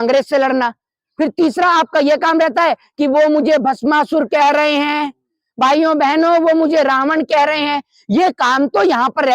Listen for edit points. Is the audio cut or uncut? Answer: uncut